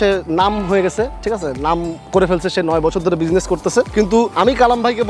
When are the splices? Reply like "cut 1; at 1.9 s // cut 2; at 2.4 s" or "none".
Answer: cut 1; at 4.0 s